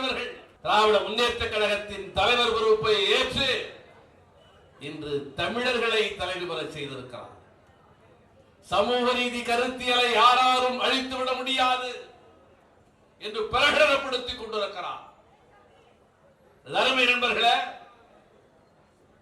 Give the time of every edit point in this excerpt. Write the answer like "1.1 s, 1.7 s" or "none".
none